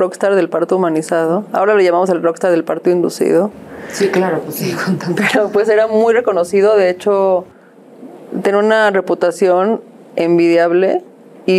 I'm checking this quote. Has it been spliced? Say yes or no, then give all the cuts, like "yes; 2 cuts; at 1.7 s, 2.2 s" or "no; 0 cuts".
no; 0 cuts